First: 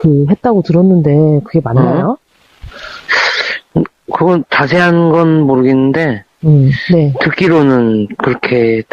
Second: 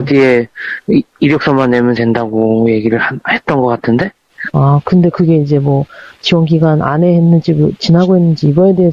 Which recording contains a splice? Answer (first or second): first